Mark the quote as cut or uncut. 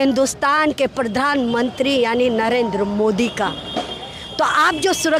uncut